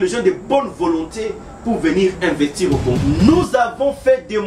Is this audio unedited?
no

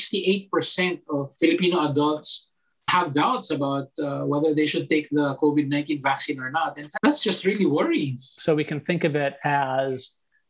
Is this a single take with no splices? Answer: no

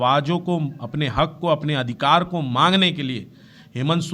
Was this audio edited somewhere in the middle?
no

